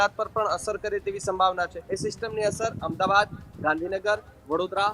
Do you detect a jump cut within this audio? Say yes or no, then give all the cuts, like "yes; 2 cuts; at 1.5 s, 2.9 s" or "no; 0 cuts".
yes; 1 cut; at 1.8 s